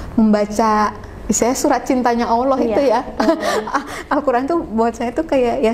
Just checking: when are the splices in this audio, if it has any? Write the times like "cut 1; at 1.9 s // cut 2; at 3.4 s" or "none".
none